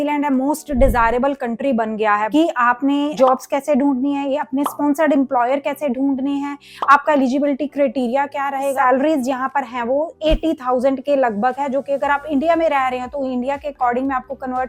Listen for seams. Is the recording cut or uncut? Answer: cut